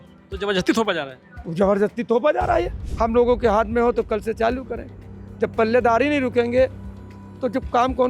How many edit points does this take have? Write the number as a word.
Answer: one